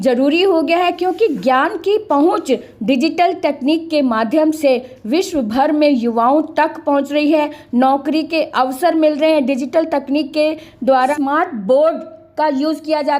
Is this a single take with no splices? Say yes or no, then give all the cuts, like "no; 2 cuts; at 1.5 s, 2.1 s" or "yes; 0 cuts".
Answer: no; 1 cut; at 11.1 s